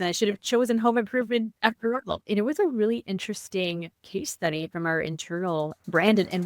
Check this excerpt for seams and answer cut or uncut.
cut